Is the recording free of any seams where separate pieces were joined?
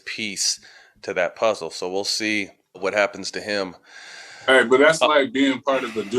yes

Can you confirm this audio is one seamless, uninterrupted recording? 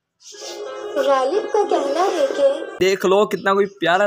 no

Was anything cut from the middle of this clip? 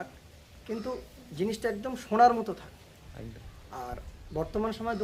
no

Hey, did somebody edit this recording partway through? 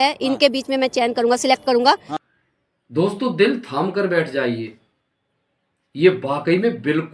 yes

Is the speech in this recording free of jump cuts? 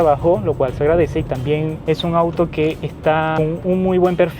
no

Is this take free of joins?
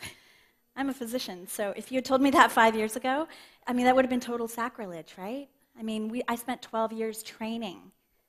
yes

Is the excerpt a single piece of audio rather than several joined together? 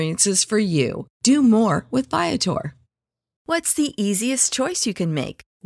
no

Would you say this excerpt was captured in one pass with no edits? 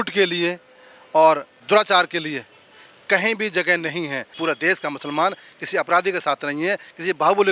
no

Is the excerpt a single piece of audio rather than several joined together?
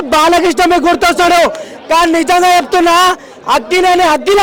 yes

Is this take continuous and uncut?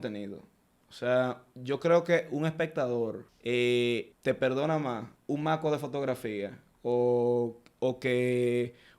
no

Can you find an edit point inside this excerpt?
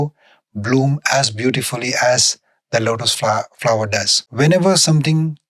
yes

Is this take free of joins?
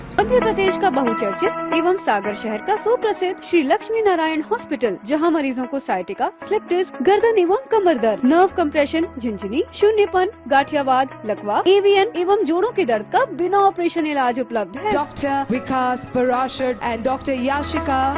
yes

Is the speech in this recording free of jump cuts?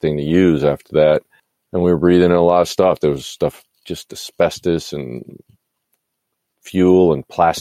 yes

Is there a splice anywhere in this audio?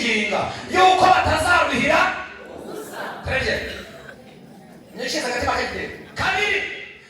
yes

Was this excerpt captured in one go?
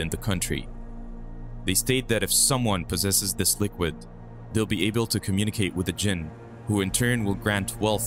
yes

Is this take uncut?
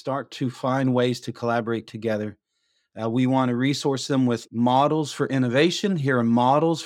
yes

